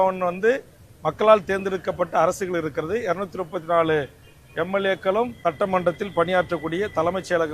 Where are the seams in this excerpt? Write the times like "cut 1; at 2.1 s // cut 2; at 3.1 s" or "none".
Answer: cut 1; at 5.3 s